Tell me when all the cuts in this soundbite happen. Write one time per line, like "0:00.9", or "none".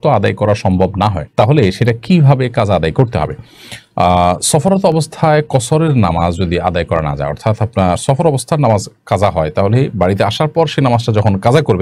none